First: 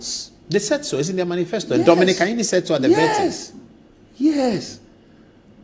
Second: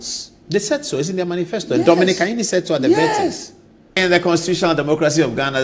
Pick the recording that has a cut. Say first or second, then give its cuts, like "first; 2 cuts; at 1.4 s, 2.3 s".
second; 1 cut; at 4.0 s